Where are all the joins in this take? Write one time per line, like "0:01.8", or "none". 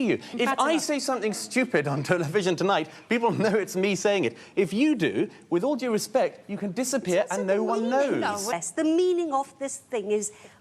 0:08.5